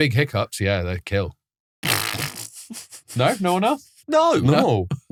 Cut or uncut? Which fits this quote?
uncut